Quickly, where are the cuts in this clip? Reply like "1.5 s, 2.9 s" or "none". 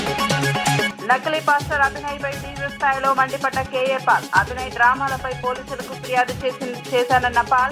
0.9 s